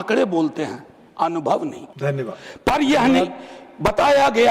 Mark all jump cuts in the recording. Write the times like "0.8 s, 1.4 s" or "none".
1.9 s